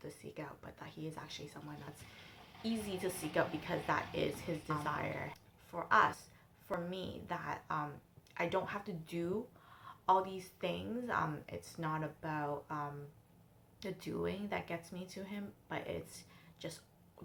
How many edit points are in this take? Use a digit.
0